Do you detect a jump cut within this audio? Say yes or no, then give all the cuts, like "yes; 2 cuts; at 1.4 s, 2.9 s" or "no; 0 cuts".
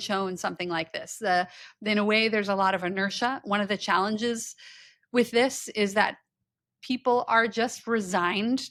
no; 0 cuts